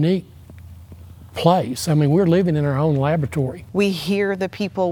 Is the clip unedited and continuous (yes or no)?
no